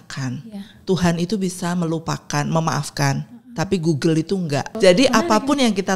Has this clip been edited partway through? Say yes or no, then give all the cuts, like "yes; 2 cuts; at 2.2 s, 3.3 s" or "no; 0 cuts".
yes; 1 cut; at 4.7 s